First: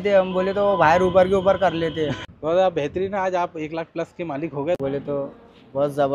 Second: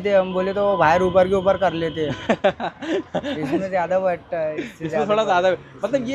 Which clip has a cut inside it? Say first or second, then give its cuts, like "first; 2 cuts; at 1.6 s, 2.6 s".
first; 2 cuts; at 2.2 s, 4.8 s